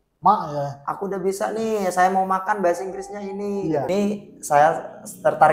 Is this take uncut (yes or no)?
no